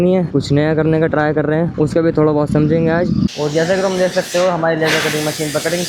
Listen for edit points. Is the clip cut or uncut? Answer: cut